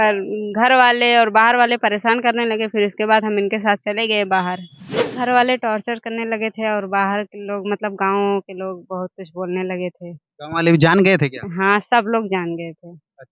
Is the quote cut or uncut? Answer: cut